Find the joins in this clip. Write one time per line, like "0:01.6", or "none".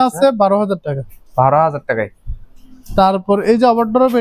none